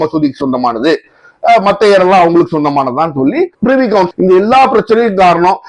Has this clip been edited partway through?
yes; 1 cut; at 4.1 s

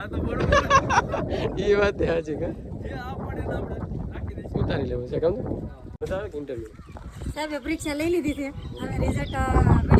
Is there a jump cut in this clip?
no; 0 cuts

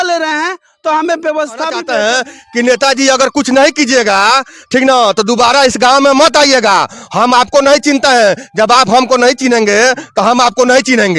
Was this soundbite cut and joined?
yes; 1 cut; at 1.8 s

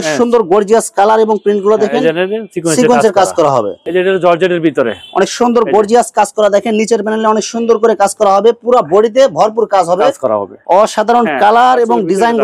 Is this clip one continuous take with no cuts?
no; 2 cuts; at 3.8 s, 10.6 s

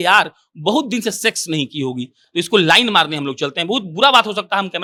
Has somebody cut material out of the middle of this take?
no; 0 cuts

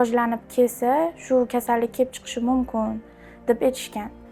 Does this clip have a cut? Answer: no; 0 cuts

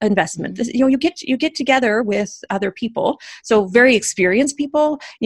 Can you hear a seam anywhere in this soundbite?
no; 0 cuts

